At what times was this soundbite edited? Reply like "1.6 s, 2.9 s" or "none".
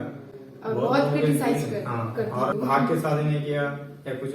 2.5 s